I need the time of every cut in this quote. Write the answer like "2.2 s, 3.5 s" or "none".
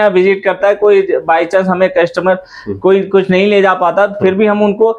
none